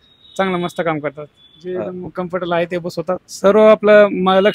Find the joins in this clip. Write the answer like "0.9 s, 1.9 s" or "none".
3.3 s